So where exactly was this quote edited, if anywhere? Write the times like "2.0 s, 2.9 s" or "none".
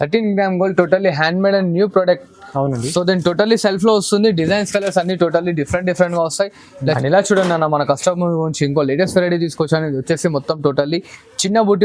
7.0 s